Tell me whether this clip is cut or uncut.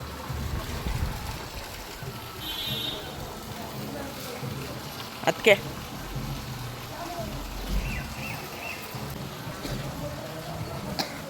cut